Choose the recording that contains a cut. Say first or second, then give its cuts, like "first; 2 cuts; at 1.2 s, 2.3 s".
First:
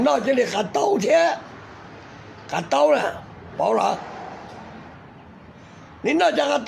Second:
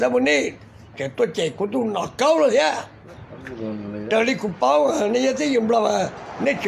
second; 1 cut; at 2.9 s